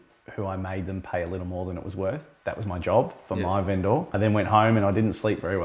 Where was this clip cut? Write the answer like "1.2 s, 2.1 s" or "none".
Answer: 2.3 s, 4.1 s